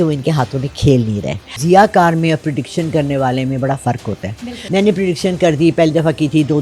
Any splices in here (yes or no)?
yes